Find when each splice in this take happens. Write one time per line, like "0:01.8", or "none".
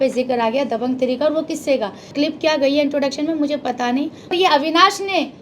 0:02.1
0:04.3

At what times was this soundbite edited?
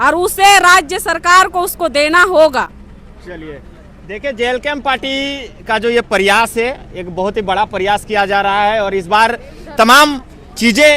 none

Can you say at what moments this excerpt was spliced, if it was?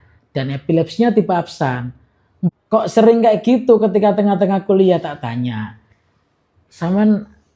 0:02.5

